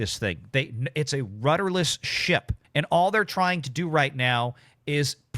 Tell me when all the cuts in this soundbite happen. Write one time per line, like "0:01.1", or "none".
0:02.6